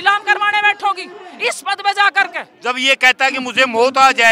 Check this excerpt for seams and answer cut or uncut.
cut